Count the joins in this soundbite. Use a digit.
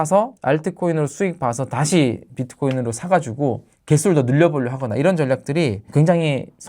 0